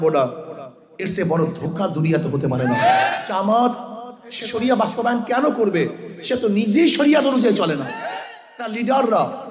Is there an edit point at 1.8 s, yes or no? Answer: no